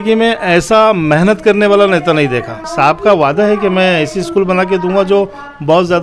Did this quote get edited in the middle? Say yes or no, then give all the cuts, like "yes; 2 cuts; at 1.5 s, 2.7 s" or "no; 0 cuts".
yes; 1 cut; at 2.6 s